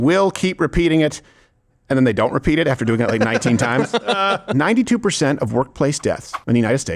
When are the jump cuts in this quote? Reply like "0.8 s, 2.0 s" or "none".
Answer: 4.5 s